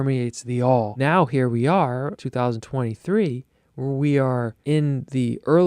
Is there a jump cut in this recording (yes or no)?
yes